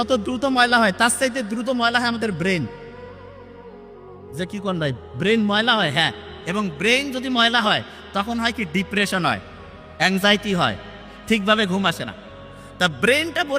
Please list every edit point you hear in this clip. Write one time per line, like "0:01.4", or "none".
none